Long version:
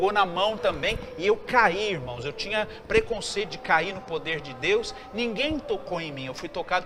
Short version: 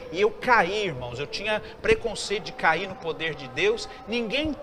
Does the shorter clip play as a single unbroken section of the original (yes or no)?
yes